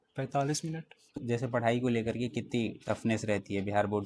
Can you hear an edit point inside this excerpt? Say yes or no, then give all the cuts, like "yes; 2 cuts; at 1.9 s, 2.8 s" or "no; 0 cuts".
yes; 1 cut; at 1.2 s